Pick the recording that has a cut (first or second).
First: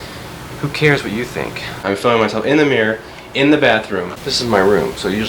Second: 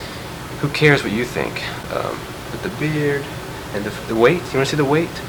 first